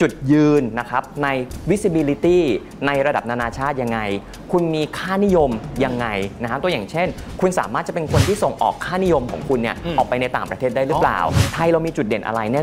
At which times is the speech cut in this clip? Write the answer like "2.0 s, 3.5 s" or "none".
11.4 s

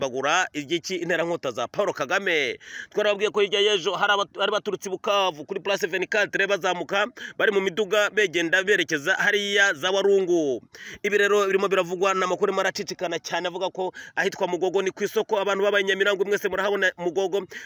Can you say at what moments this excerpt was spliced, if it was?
none

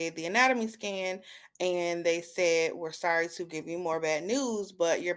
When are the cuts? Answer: none

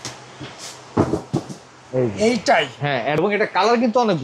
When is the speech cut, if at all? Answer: 3.2 s

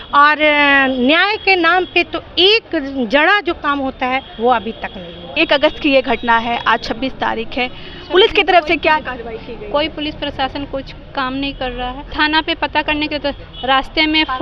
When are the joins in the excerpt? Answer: 5.3 s, 12.0 s

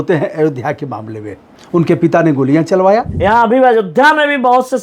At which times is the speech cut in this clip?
3.1 s

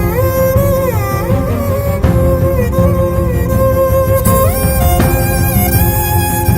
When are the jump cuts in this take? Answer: none

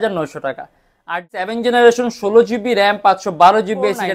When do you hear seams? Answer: 1.5 s

